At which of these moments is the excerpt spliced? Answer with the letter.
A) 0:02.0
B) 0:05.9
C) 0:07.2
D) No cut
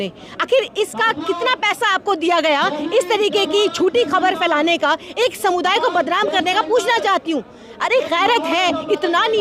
D